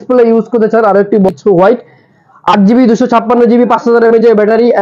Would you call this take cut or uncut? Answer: cut